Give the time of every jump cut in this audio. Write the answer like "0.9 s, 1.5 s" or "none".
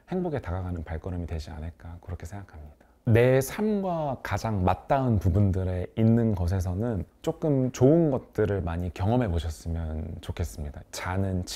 none